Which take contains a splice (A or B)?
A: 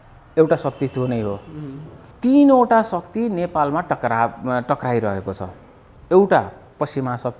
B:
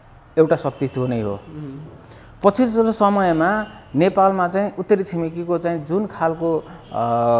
A